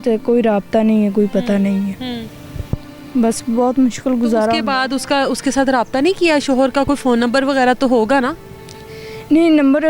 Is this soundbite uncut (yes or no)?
yes